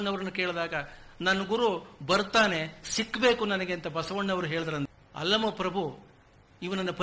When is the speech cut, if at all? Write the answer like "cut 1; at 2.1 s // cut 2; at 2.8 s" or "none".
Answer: cut 1; at 4.9 s